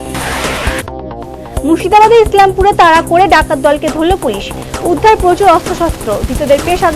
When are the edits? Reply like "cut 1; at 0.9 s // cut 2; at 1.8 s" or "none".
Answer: cut 1; at 1.0 s